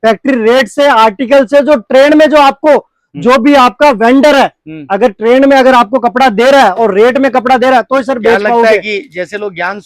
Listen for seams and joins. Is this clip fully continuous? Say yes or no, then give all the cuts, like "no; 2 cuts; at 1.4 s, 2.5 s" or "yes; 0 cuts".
yes; 0 cuts